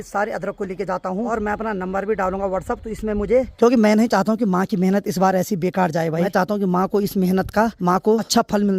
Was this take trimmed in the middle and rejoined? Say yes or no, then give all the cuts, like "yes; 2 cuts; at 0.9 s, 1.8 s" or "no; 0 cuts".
yes; 4 cuts; at 1.3 s, 3.5 s, 6.3 s, 8.0 s